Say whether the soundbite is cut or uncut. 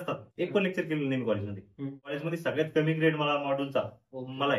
cut